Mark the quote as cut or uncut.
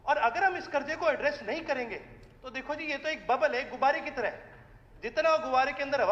uncut